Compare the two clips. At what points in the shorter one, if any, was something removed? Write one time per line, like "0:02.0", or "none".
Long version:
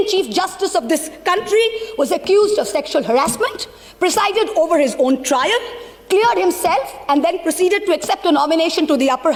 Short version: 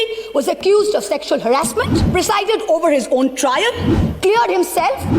0:02.0